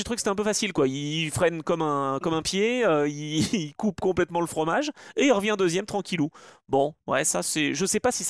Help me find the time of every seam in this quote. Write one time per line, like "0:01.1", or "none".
none